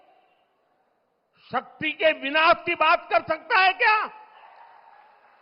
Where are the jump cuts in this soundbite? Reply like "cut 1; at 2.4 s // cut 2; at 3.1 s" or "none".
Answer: cut 1; at 4.4 s